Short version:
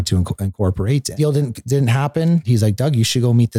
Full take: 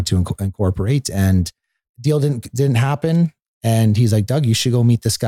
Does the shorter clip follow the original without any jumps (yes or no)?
no